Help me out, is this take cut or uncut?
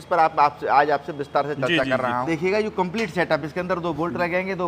cut